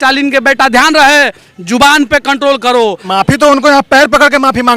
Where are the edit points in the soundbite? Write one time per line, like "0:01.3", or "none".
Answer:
0:03.1